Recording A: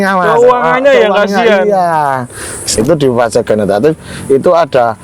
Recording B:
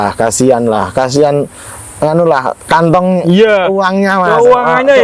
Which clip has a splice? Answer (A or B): A